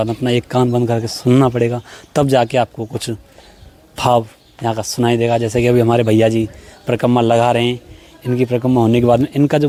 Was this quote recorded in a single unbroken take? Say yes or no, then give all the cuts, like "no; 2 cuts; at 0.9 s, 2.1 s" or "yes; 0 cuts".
yes; 0 cuts